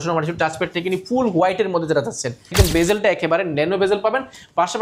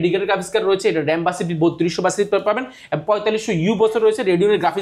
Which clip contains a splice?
first; 1 cut; at 2.5 s

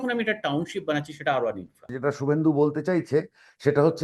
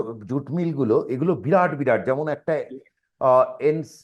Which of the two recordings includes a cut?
first; 1 cut; at 1.9 s

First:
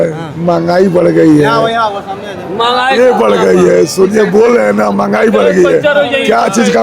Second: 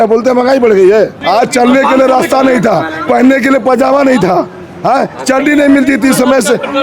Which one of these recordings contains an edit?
second; 1 cut; at 1.2 s

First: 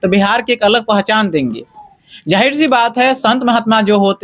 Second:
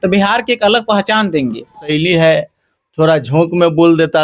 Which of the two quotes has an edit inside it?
second; 1 cut; at 1.9 s

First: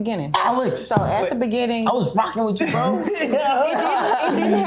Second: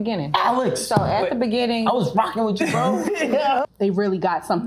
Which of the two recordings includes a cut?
second; 1 cut; at 3.6 s

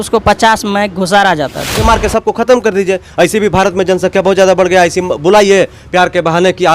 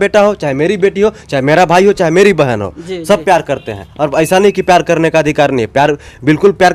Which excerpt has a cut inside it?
first; 1 cut; at 1.8 s

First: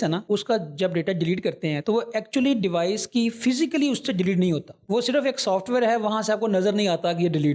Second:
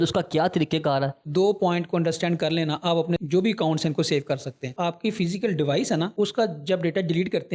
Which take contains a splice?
second; 2 cuts; at 1.2 s, 4.7 s

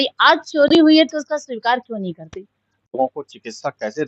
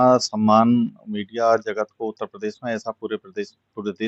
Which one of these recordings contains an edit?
first; 1 cut; at 3.0 s

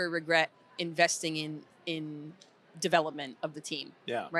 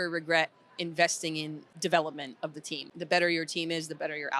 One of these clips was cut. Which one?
second; 2 cuts; at 1.6 s, 2.9 s

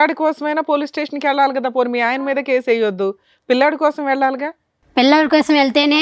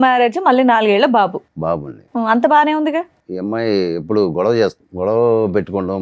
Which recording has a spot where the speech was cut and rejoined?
second; 2 cuts; at 3.2 s, 4.8 s

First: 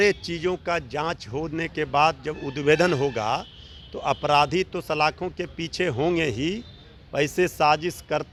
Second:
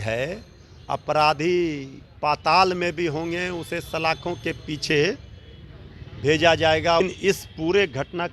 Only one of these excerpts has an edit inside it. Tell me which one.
second; 1 cut; at 7.0 s

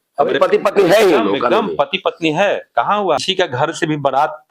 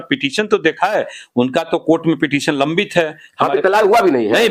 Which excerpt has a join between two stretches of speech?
first; 1 cut; at 3.2 s

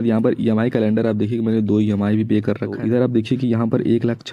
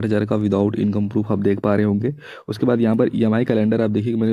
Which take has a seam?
first; 1 cut; at 2.8 s

